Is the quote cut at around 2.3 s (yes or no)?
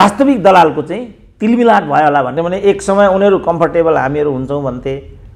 yes